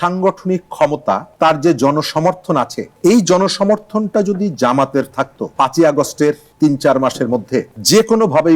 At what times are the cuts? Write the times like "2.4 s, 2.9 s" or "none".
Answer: 1.3 s, 5.5 s